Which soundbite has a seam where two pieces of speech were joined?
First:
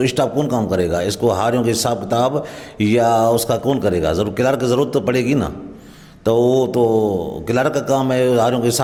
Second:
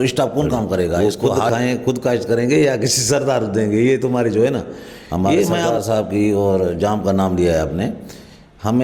second; 2 cuts; at 1.0 s, 5.7 s

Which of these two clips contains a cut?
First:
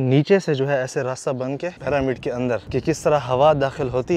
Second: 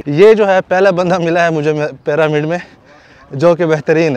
first; 2 cuts; at 1.7 s, 2.7 s

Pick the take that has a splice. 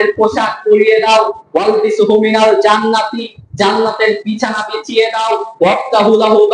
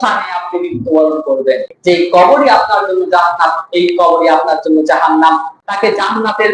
second; 2 cuts; at 1.7 s, 5.5 s

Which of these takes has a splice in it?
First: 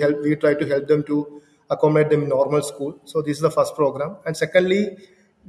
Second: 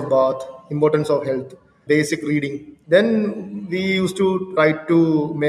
second; 3 cuts; at 1.7 s, 2.7 s, 4.5 s

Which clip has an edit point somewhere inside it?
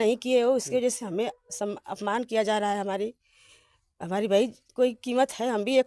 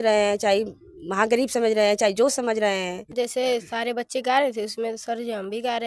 second; 1 cut; at 3.1 s

